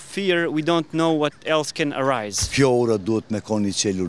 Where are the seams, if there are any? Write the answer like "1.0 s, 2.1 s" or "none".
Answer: 2.4 s